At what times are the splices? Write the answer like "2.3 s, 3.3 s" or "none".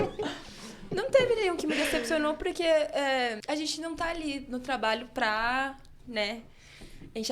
3.4 s